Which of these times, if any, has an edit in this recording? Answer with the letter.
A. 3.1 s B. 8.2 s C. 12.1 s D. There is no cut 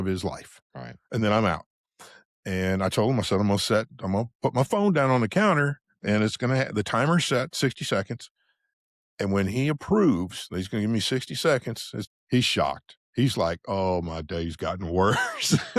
C